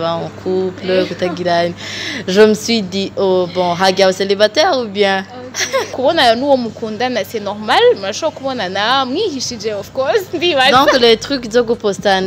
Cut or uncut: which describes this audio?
cut